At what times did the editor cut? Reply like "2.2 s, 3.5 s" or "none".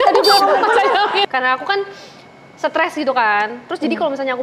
1.3 s